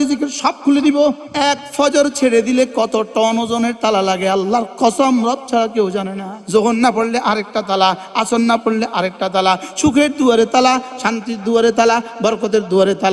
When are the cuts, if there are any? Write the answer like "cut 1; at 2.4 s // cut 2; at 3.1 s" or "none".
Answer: cut 1; at 1.3 s // cut 2; at 6.4 s